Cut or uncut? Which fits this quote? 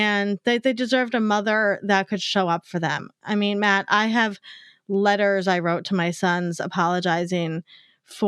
uncut